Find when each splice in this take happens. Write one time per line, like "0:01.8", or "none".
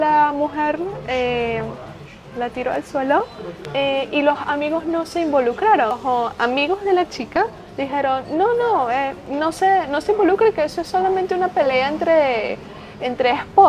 0:06.0